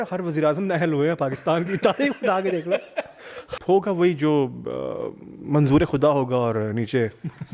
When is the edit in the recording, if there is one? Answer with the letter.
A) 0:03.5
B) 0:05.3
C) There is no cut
A